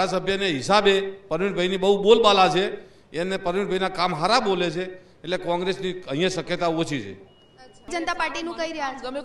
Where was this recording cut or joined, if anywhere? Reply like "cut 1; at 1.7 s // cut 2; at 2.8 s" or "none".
cut 1; at 7.9 s